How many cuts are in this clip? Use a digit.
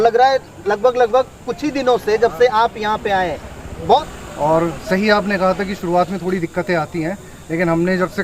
1